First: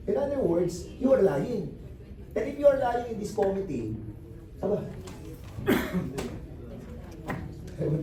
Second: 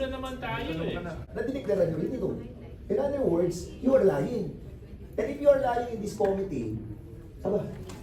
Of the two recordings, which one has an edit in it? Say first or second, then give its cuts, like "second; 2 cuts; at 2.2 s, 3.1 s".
second; 1 cut; at 1.3 s